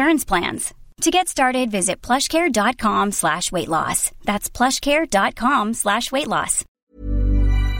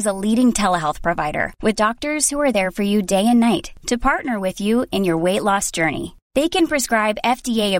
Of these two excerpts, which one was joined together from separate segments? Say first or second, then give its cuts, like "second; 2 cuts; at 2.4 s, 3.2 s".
first; 1 cut; at 6.6 s